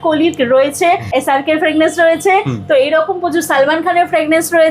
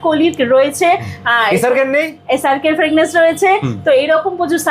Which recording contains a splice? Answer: first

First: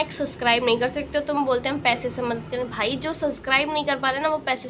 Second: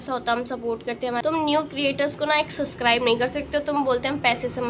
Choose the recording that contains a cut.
second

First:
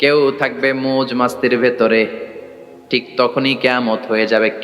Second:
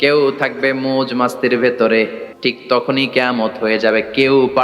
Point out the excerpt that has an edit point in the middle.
second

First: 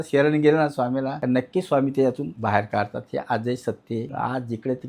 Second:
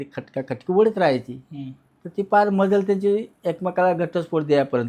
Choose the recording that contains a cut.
first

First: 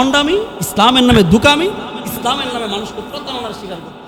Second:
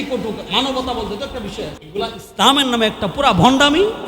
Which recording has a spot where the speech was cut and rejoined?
second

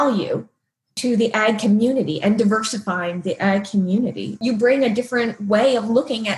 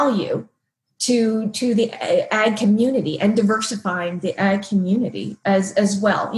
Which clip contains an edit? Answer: first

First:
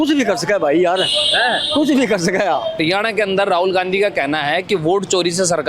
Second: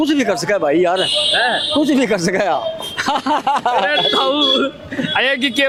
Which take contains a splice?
first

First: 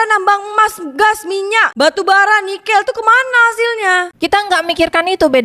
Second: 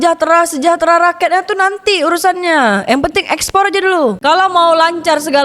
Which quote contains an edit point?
second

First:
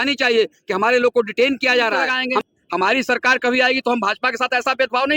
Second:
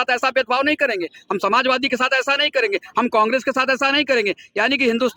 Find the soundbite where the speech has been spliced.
first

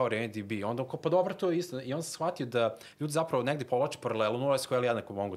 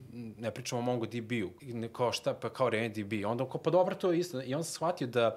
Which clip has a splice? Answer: second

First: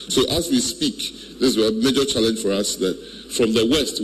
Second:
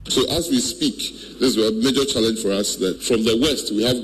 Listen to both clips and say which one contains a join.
second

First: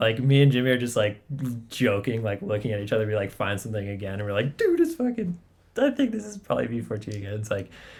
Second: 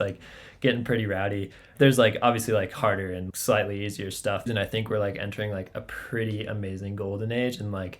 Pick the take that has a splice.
second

